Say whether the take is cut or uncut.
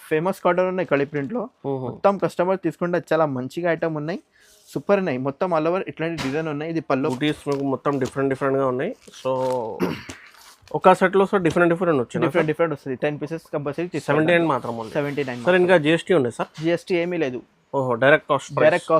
cut